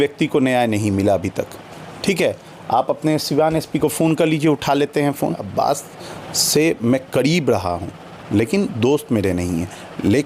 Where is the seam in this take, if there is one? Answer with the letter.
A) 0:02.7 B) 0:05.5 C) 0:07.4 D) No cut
B